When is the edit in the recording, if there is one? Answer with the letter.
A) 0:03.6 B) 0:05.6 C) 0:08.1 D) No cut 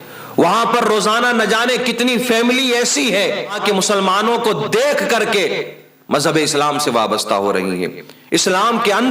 A